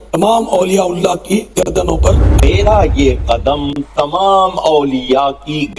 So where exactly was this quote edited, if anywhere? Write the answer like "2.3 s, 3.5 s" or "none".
2.4 s